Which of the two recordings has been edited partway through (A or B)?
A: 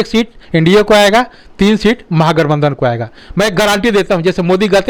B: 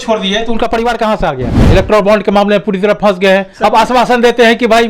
B